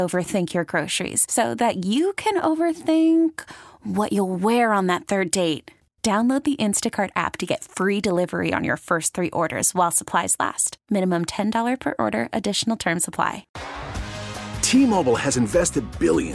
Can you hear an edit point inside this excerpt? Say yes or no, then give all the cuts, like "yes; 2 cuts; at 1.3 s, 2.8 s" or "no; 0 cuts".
yes; 1 cut; at 13.5 s